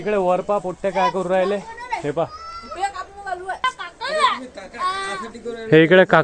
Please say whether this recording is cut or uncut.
uncut